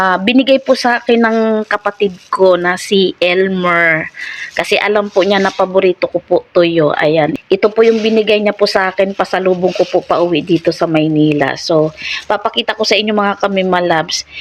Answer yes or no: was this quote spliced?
yes